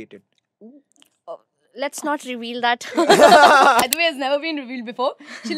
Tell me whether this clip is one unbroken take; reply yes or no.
no